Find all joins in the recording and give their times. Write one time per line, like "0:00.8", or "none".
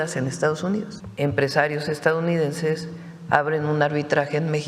0:01.0